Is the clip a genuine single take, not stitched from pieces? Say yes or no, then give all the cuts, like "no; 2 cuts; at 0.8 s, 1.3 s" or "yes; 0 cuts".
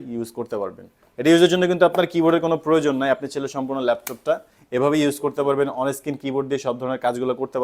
yes; 0 cuts